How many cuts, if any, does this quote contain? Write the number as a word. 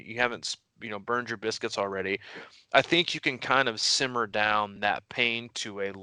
zero